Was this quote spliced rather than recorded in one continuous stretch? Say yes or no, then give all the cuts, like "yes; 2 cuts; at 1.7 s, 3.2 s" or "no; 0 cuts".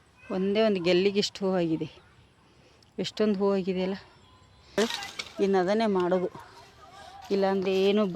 yes; 1 cut; at 4.8 s